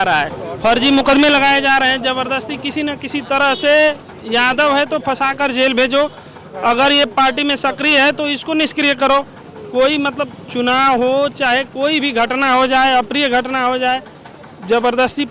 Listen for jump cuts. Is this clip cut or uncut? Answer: uncut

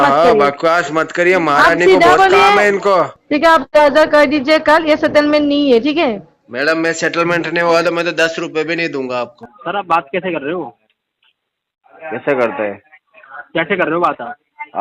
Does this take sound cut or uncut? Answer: cut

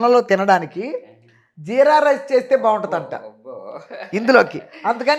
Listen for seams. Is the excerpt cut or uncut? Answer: uncut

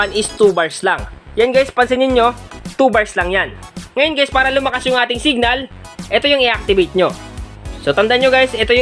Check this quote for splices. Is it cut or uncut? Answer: uncut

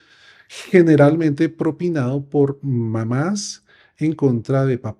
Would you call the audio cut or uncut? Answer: uncut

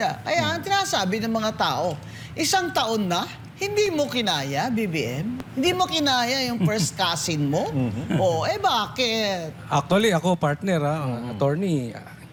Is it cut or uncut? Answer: uncut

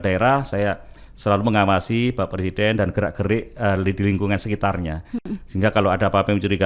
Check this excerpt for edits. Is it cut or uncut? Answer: uncut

